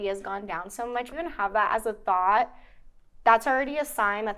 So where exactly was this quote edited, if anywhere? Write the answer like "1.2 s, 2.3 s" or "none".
1.1 s